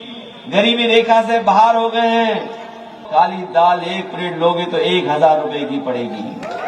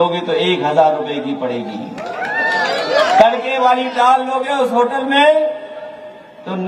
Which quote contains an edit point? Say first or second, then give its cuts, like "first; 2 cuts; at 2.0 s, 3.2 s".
first; 1 cut; at 3.0 s